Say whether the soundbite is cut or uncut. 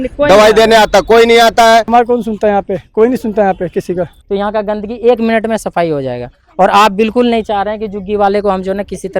cut